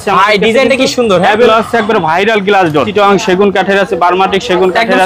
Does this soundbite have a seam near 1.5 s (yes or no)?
yes